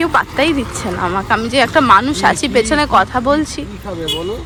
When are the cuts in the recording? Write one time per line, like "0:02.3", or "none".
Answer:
none